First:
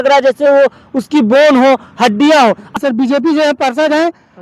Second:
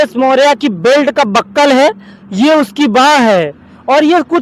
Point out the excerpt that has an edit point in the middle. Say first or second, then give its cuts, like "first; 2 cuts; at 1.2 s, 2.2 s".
first; 1 cut; at 2.8 s